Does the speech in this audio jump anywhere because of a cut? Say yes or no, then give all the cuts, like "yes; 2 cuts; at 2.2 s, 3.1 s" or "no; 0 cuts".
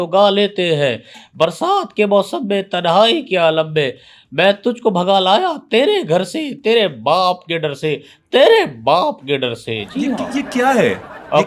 no; 0 cuts